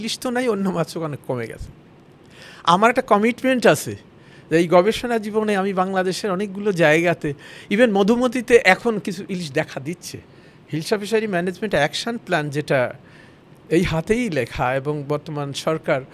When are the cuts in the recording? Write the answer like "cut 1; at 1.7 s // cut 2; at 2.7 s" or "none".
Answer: none